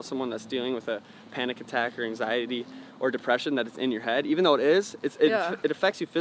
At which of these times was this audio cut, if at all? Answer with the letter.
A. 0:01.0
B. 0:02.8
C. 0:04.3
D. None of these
D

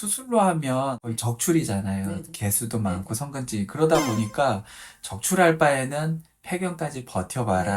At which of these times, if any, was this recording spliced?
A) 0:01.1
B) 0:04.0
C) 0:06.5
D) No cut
A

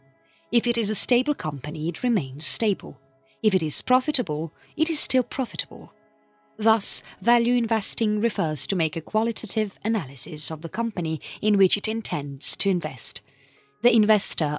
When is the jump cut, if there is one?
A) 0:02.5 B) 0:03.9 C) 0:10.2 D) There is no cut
D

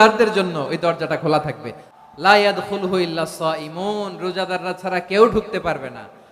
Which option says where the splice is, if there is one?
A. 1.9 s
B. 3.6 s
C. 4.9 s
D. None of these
A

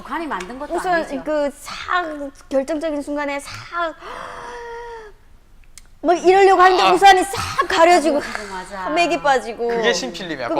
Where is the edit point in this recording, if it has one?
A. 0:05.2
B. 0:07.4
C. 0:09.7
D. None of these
B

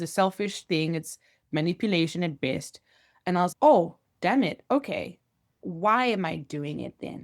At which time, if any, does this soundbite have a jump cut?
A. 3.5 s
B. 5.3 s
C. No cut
A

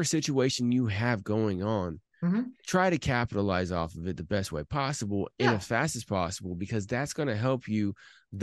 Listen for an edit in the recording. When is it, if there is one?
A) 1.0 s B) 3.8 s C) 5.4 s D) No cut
D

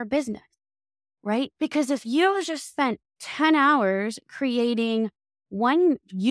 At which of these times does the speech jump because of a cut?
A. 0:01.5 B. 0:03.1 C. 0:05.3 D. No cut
B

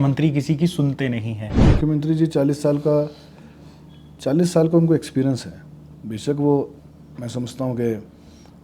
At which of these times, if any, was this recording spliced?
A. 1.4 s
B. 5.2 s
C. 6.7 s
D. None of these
A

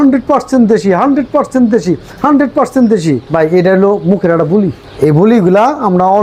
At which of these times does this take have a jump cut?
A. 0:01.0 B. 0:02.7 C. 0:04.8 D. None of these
D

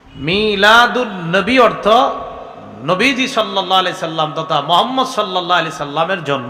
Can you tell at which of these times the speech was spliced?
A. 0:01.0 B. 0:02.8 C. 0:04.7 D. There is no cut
D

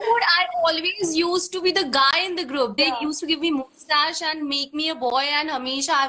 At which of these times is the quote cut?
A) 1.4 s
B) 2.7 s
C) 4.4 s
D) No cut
B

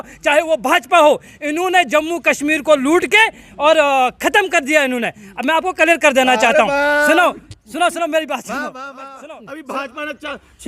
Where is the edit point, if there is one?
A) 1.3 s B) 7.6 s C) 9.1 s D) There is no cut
C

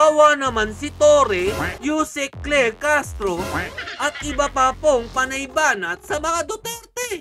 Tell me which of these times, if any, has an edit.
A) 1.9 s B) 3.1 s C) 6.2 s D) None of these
D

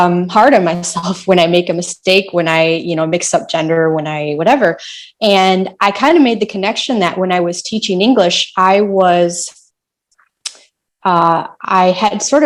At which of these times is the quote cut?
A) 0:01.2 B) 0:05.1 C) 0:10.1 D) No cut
D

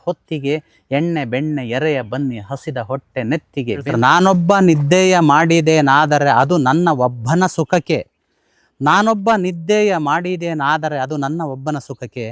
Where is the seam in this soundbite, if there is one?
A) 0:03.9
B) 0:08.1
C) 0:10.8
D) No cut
A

